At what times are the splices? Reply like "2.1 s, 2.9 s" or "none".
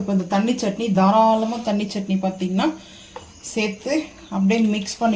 1.0 s